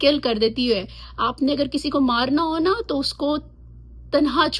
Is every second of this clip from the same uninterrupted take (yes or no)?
yes